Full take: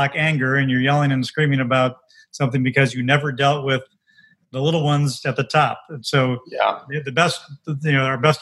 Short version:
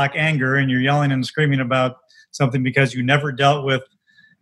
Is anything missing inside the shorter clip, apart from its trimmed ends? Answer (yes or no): no